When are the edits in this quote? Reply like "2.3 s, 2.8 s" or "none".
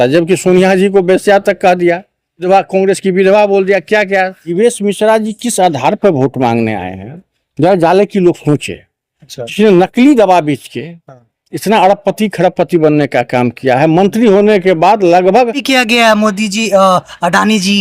2.5 s, 4.5 s, 15.6 s